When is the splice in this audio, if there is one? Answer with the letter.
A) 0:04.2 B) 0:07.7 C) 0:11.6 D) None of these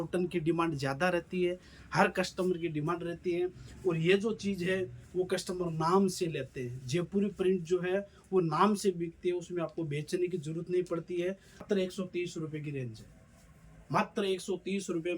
C